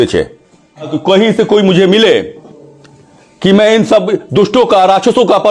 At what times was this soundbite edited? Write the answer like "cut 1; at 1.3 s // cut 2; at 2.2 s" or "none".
cut 1; at 0.9 s